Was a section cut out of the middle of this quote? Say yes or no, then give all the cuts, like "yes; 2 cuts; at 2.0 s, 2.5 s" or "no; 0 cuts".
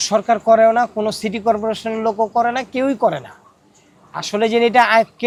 no; 0 cuts